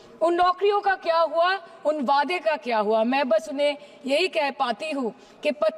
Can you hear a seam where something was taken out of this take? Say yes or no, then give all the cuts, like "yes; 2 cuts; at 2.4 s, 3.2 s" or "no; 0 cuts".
no; 0 cuts